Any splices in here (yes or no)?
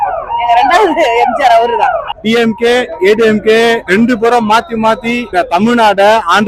no